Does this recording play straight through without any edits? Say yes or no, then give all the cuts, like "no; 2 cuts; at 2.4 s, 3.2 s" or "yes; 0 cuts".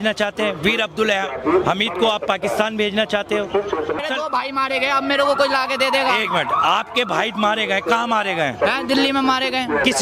no; 1 cut; at 4.0 s